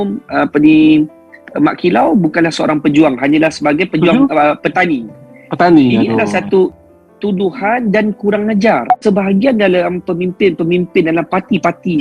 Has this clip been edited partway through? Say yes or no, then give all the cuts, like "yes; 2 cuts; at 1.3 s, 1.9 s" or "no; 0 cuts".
yes; 2 cuts; at 6.7 s, 9.0 s